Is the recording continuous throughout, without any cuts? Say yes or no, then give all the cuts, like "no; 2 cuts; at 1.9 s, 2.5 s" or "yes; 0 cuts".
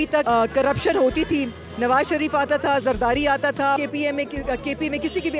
no; 1 cut; at 3.8 s